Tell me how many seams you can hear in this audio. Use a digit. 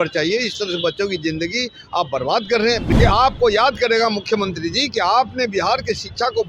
1